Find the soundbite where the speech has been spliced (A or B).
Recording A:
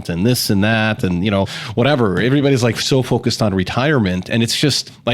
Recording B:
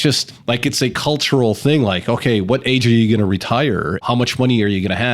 B